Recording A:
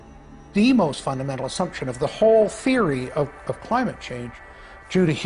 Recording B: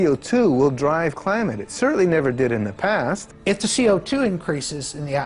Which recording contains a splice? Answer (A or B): B